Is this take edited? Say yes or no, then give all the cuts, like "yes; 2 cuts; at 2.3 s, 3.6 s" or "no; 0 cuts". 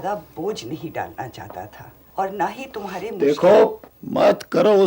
yes; 1 cut; at 2.0 s